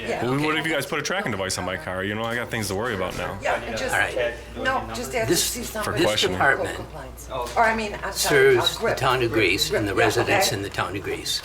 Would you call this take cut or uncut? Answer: uncut